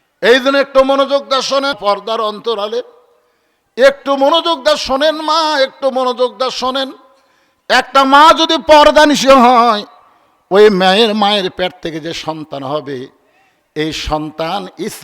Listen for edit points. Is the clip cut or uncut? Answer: cut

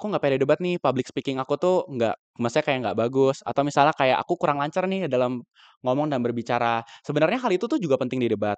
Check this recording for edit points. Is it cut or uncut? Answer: uncut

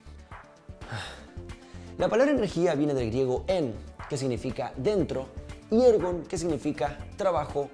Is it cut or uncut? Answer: uncut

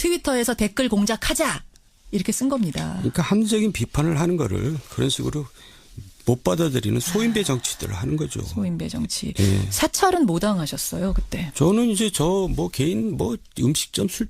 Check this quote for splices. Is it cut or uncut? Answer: cut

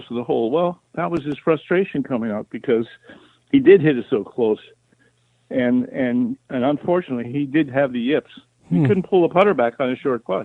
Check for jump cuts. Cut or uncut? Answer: uncut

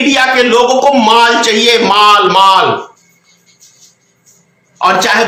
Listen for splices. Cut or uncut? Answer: uncut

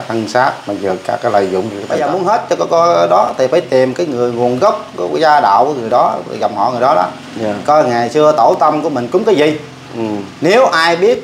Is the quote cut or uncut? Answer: cut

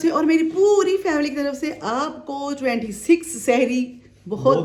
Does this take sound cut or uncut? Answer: uncut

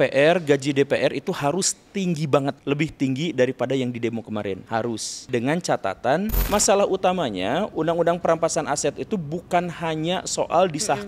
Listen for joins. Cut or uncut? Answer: cut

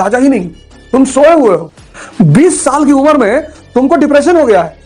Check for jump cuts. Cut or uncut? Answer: cut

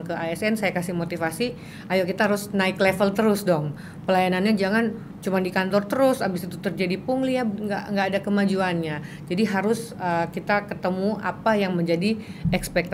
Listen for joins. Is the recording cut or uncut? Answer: uncut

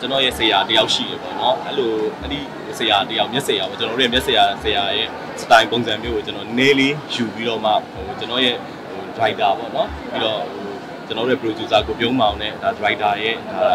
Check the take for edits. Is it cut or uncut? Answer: uncut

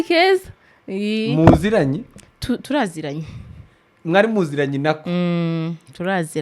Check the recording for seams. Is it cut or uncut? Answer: uncut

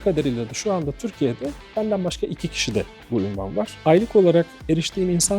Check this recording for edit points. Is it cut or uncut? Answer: cut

